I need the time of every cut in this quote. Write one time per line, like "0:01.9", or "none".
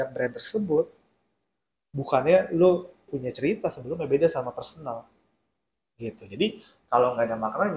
0:03.1